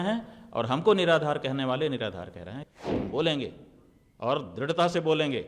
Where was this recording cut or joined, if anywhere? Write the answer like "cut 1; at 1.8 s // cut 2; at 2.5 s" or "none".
cut 1; at 2.6 s